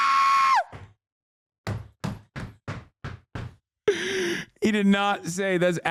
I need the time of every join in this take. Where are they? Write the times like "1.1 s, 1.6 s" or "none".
none